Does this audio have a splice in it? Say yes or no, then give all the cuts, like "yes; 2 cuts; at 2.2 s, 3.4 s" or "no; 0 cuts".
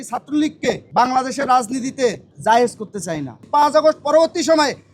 yes; 3 cuts; at 0.8 s, 2.3 s, 3.4 s